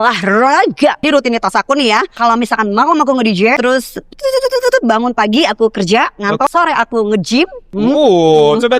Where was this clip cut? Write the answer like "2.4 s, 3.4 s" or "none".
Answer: 1.0 s, 2.1 s, 3.6 s, 6.5 s, 7.7 s